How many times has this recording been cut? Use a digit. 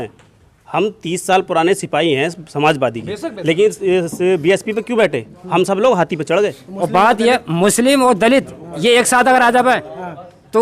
1